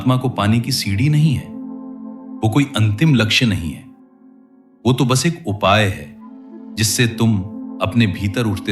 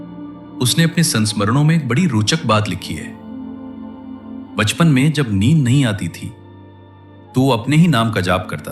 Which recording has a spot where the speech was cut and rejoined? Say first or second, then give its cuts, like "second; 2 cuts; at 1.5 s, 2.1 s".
second; 2 cuts; at 2.9 s, 4.5 s